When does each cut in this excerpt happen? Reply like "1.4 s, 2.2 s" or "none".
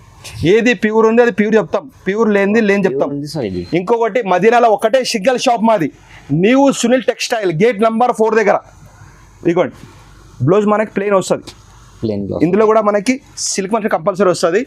none